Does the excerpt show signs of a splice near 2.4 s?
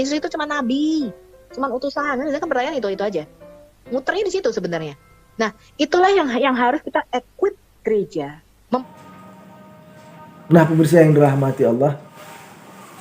no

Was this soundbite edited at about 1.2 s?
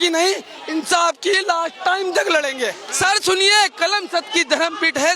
no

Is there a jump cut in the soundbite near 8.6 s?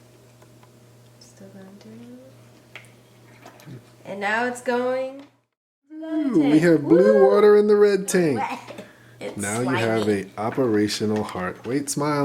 yes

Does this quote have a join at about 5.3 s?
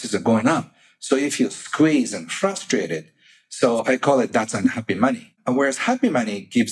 yes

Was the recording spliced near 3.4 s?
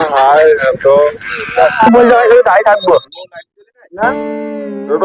no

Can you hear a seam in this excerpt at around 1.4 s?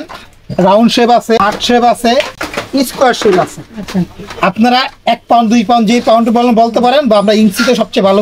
yes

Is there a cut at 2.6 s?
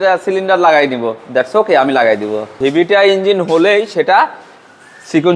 yes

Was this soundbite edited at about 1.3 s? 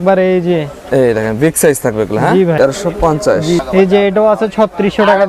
no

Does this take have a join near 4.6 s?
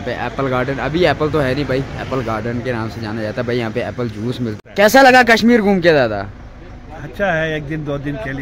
yes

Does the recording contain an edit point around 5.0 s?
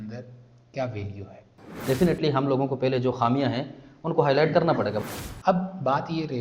yes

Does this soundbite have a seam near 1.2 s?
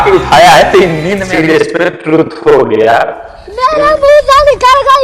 yes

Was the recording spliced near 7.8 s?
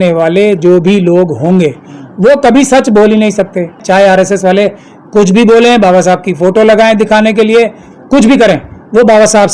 no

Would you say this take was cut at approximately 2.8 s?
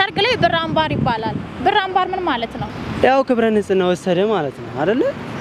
yes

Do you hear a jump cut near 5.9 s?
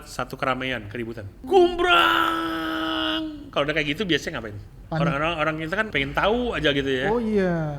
yes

